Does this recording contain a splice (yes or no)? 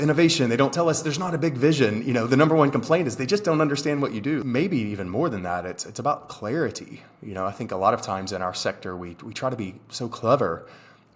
yes